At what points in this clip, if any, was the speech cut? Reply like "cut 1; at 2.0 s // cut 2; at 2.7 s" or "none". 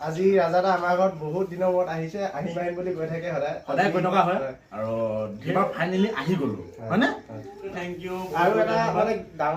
cut 1; at 5.4 s // cut 2; at 7.7 s

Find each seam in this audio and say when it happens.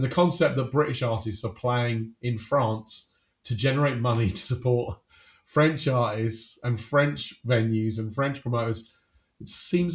none

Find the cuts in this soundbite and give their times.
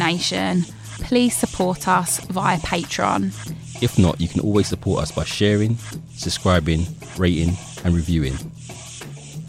cut 1; at 8.4 s

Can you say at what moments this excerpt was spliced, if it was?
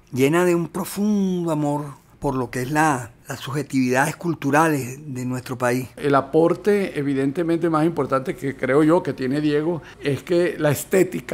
cut 1; at 5.9 s

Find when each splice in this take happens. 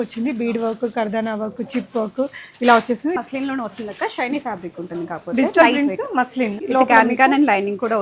cut 1; at 3.2 s // cut 2; at 6.6 s

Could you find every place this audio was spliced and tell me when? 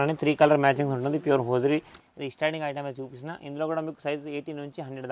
cut 1; at 1.9 s

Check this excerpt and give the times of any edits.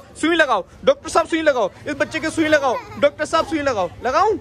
none

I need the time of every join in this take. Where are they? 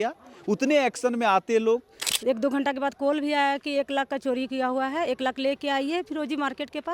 cut 1; at 2.0 s

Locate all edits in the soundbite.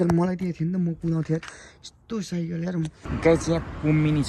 cut 1; at 3.0 s

